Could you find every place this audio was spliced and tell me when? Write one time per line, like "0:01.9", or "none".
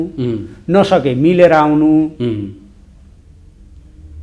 none